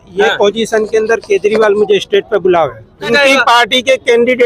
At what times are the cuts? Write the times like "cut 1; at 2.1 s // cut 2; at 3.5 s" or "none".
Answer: cut 1; at 3.0 s